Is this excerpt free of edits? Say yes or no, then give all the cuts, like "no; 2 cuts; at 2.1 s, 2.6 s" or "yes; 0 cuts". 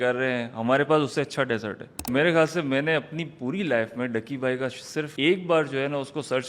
no; 2 cuts; at 2.1 s, 5.1 s